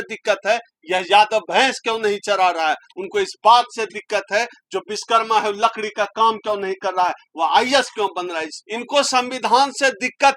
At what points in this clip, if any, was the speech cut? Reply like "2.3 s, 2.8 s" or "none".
8.5 s